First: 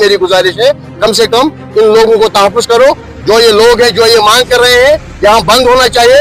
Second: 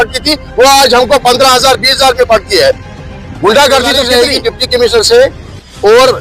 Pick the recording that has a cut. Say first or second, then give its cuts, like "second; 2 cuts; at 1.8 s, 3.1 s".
second; 1 cut; at 4.1 s